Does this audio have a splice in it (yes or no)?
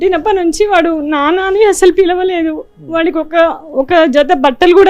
no